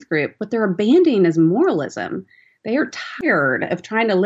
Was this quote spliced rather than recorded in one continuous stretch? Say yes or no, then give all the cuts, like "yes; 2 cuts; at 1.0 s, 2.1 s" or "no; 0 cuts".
no; 0 cuts